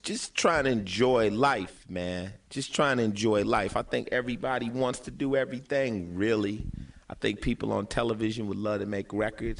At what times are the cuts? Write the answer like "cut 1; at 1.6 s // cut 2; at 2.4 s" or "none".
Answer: none